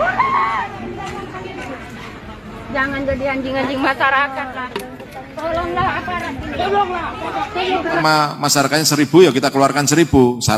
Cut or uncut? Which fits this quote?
cut